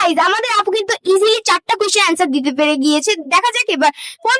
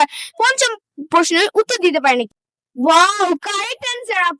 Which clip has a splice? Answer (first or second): second